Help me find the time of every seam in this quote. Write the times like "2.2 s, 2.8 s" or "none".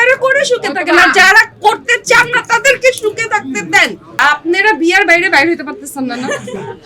4.2 s